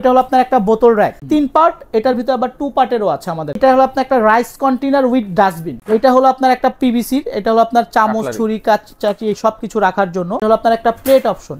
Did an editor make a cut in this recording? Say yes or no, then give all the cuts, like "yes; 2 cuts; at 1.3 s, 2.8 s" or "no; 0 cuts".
yes; 4 cuts; at 1.2 s, 3.6 s, 5.7 s, 10.4 s